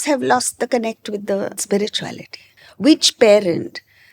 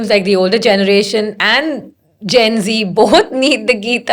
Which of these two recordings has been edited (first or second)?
first